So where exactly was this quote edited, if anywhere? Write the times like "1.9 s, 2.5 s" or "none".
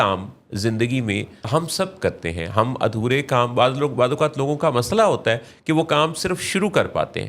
1.5 s